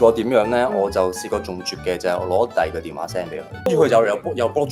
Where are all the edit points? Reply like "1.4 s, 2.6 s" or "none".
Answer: 3.7 s